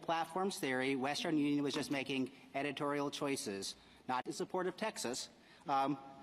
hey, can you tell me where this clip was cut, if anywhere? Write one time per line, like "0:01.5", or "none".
none